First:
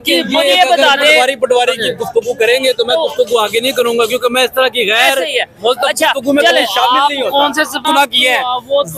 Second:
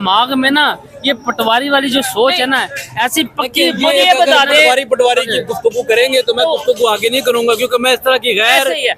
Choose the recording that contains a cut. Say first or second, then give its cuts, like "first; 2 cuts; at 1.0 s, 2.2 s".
first; 1 cut; at 7.8 s